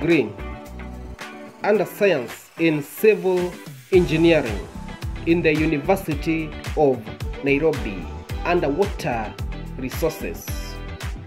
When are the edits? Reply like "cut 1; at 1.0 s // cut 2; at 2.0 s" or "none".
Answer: cut 1; at 10.4 s